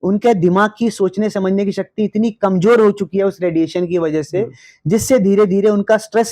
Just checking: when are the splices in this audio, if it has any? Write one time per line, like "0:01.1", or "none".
none